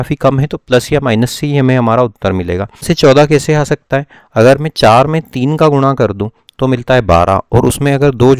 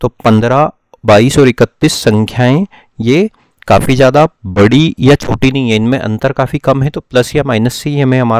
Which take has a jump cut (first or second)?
first